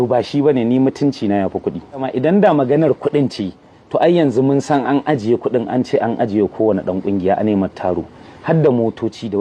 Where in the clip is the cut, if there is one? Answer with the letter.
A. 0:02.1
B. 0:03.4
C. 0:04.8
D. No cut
A